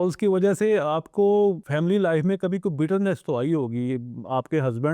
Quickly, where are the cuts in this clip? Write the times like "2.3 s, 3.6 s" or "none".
1.6 s